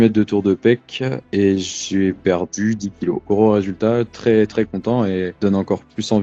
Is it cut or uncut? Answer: cut